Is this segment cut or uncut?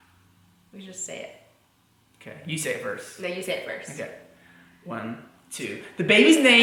uncut